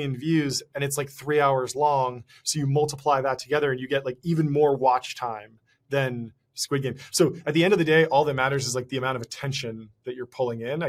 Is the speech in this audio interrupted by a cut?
no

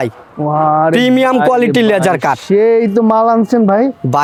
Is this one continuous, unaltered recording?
yes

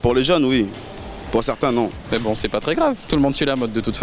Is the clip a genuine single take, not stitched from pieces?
no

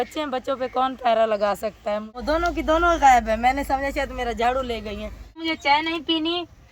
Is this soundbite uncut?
no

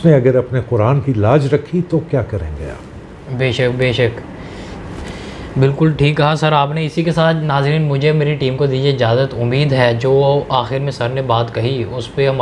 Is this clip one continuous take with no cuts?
yes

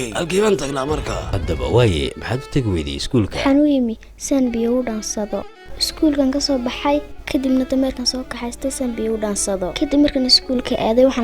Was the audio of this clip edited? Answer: yes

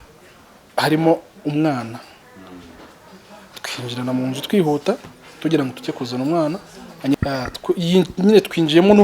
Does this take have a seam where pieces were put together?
yes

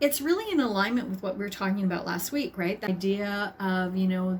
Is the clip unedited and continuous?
no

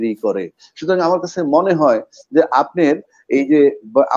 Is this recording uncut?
yes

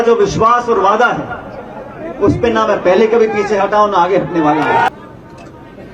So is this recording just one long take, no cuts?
no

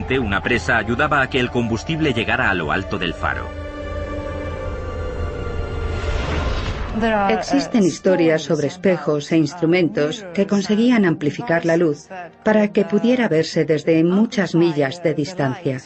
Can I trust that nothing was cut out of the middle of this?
no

